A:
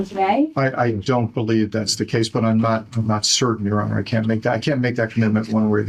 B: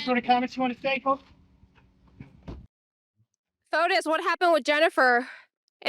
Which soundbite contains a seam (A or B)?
B